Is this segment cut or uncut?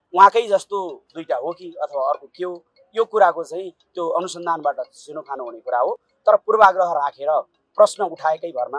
uncut